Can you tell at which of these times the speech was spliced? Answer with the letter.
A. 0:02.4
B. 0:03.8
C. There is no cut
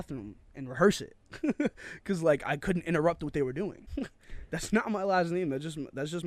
B